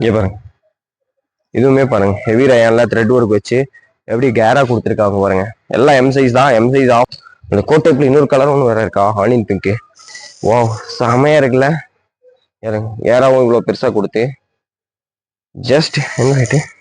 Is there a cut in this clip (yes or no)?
yes